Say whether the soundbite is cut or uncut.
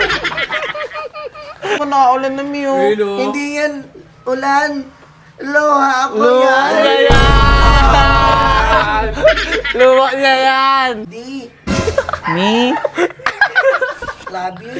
cut